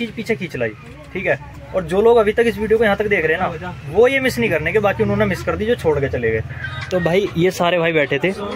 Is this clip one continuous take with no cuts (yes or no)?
yes